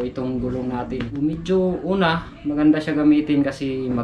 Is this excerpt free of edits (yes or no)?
no